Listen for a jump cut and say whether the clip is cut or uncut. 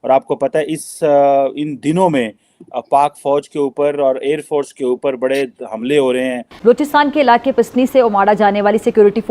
cut